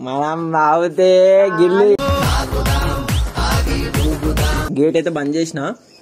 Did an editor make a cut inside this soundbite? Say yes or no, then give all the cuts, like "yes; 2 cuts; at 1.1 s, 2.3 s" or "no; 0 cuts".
yes; 1 cut; at 4.7 s